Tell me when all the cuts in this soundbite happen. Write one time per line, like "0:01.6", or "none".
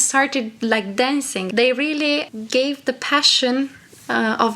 0:01.4
0:02.3